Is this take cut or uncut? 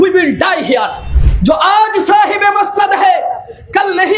cut